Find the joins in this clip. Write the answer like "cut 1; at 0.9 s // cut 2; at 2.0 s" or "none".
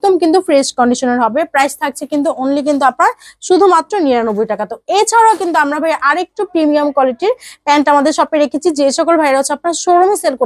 none